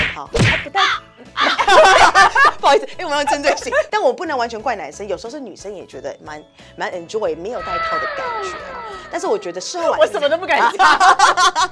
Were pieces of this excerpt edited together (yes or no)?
yes